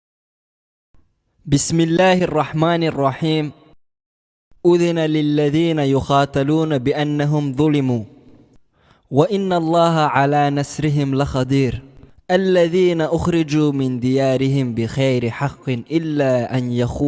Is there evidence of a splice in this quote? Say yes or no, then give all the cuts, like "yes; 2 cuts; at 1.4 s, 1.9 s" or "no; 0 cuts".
no; 0 cuts